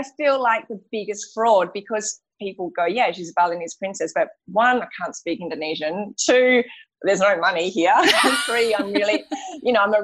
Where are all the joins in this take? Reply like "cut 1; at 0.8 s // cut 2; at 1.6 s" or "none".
cut 1; at 2.3 s

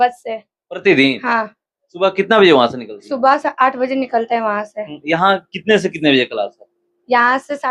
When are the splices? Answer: none

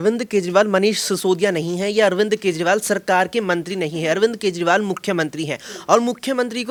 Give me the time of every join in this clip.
none

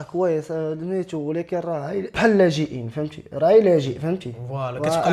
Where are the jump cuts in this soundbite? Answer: cut 1; at 2.1 s

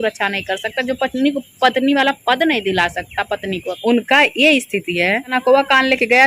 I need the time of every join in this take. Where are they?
none

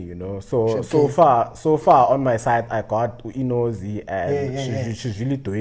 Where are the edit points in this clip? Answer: none

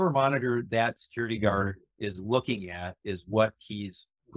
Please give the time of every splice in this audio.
none

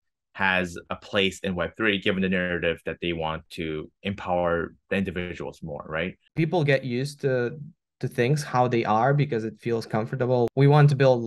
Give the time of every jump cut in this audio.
cut 1; at 6.2 s // cut 2; at 10.5 s

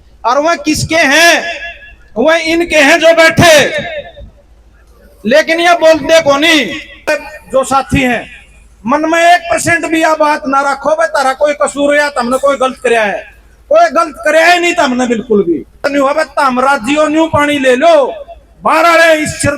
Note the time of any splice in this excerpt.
cut 1; at 7.1 s // cut 2; at 15.8 s

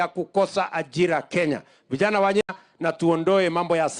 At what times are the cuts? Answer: cut 1; at 2.4 s

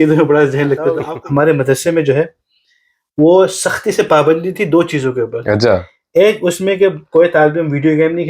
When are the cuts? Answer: cut 1; at 1.0 s

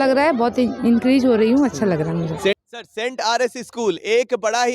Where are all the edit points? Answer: cut 1; at 2.5 s

